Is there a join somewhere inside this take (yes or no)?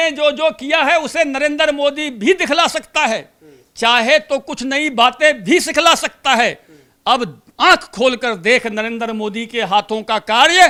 no